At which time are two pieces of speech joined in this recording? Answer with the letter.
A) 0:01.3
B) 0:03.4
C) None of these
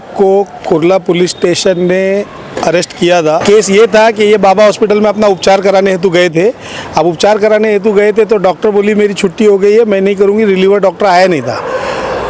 B